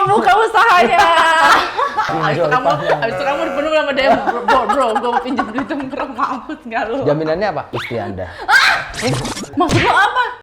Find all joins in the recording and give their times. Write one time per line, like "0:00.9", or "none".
0:09.5